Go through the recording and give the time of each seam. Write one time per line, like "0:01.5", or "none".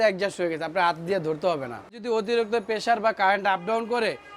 0:02.0